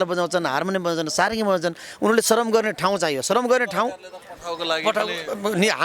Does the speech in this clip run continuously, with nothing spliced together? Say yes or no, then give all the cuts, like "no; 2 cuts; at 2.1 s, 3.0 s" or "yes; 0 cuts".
yes; 0 cuts